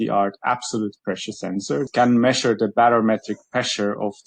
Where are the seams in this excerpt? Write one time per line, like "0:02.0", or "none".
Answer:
0:01.9